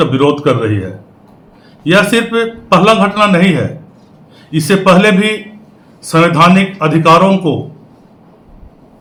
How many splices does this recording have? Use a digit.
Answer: 0